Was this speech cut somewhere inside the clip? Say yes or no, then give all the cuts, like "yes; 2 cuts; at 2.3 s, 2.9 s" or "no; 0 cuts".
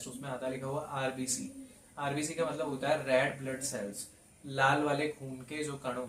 no; 0 cuts